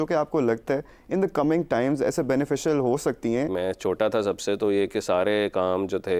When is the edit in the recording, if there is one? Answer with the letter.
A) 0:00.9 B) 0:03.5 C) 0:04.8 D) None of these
B